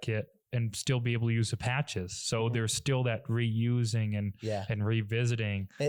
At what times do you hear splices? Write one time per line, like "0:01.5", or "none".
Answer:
none